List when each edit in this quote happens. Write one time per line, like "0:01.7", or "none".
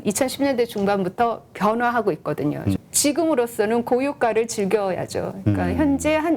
0:02.8